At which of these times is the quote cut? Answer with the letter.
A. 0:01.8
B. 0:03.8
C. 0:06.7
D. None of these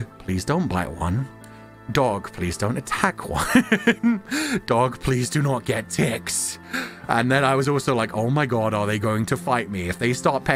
D